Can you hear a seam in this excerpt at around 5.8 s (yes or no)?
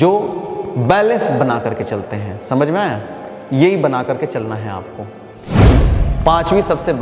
yes